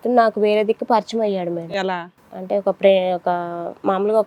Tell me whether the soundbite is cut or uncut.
uncut